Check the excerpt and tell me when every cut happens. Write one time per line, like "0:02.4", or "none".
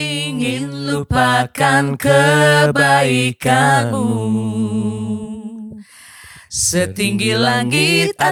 none